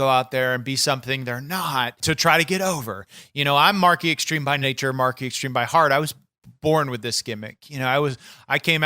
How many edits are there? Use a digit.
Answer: 2